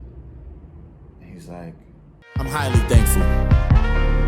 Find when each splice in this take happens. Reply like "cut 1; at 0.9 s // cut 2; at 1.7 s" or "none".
cut 1; at 2.1 s